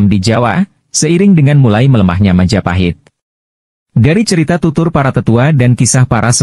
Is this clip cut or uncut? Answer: uncut